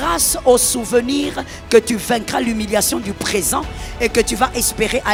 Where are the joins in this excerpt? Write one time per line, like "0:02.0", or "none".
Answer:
none